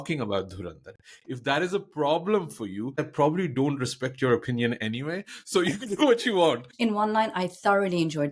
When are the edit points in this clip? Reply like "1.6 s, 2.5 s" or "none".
3.1 s, 6.7 s